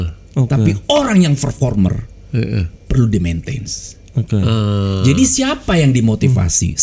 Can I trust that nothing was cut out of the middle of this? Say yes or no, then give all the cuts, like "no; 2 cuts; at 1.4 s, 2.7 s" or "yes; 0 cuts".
yes; 0 cuts